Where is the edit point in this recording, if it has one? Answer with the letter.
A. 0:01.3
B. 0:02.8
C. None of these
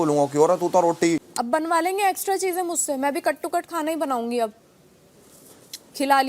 A